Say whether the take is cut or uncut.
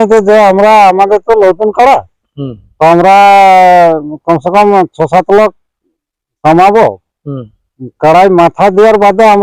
uncut